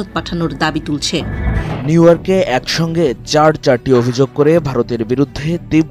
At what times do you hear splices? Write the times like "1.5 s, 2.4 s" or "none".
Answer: 1.7 s